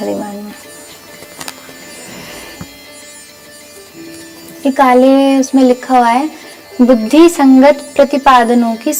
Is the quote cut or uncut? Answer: uncut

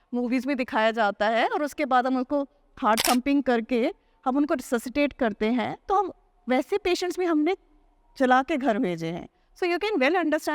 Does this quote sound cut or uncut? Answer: uncut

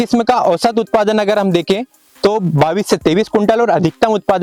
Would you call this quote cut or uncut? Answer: uncut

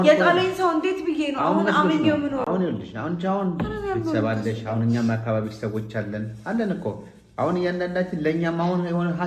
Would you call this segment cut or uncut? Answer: uncut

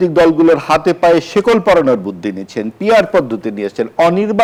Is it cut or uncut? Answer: uncut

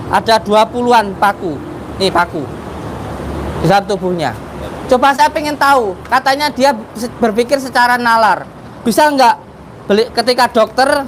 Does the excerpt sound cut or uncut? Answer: uncut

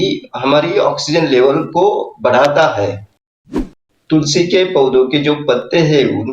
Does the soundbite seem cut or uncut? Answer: cut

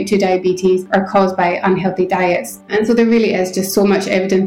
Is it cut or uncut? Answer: cut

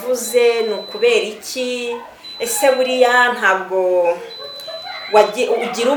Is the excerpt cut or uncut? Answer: uncut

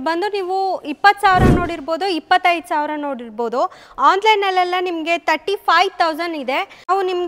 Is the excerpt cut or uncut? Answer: uncut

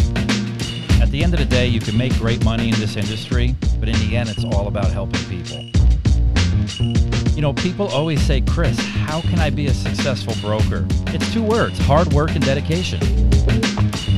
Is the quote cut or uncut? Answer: uncut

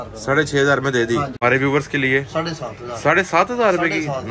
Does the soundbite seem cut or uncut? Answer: cut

